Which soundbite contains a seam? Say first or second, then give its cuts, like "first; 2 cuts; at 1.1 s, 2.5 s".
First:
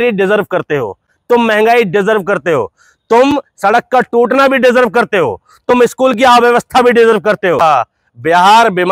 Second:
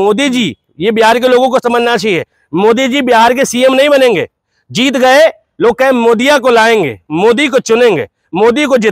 first; 1 cut; at 7.6 s